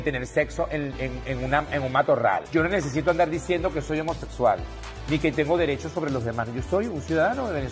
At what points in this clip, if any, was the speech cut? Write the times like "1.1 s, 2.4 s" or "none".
2.4 s